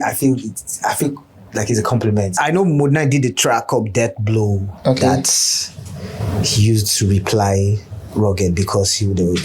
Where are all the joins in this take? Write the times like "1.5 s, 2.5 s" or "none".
2.3 s